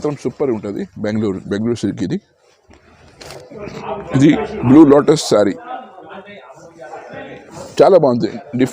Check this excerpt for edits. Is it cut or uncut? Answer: cut